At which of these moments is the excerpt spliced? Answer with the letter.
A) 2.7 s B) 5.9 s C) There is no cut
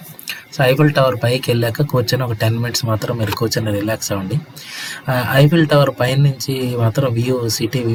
C